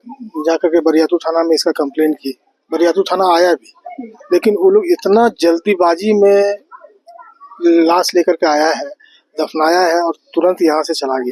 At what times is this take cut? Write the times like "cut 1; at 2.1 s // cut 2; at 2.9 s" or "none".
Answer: none